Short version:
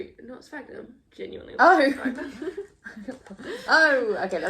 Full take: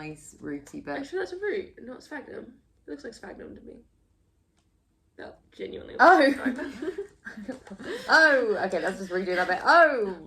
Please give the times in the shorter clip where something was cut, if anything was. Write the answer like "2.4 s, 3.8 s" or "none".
1.0 s